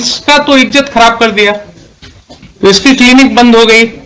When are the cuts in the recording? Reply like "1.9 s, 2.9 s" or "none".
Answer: 2.4 s